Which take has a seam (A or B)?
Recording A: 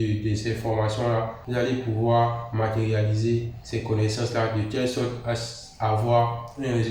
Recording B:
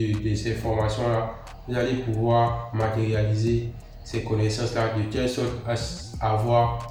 A